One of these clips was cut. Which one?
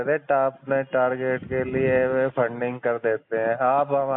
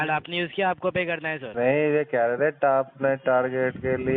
second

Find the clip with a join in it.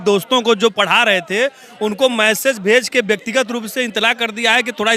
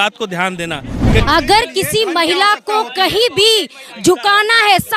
second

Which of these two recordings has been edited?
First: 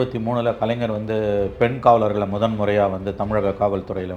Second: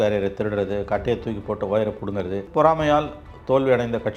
second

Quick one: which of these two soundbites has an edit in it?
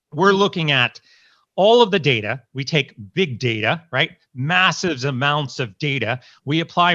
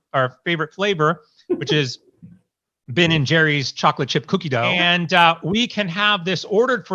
second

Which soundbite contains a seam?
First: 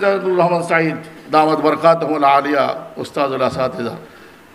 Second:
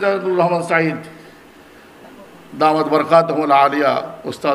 first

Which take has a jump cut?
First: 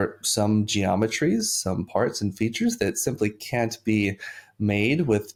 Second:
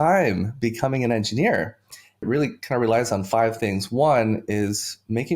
second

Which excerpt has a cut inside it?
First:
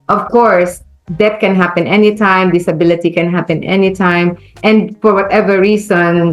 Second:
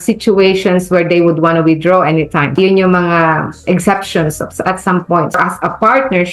second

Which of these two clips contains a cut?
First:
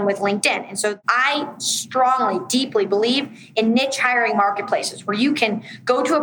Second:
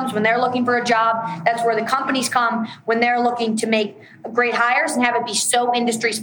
first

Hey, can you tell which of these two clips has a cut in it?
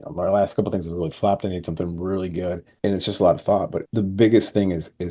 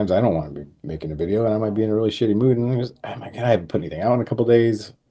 first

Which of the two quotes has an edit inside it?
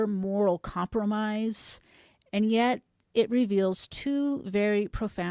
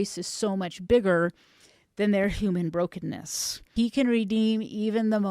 second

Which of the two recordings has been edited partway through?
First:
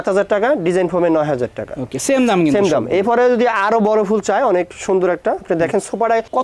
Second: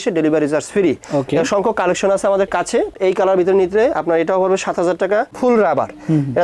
second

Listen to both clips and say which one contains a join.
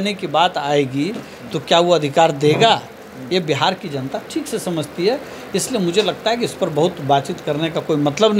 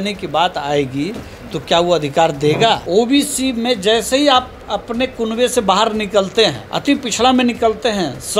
second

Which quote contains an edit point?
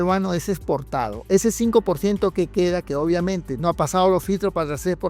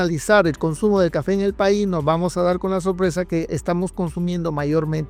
first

